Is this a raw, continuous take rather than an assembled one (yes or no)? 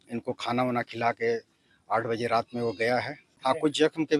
no